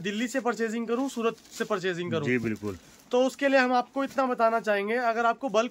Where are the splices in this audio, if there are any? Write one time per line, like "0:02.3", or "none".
none